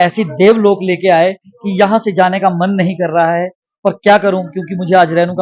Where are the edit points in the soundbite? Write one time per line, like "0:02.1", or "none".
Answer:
none